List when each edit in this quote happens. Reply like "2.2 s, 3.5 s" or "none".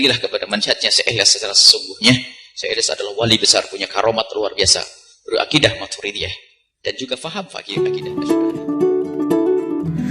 7.7 s